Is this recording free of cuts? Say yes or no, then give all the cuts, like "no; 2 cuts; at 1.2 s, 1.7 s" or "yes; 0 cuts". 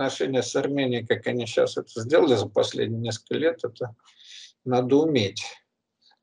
yes; 0 cuts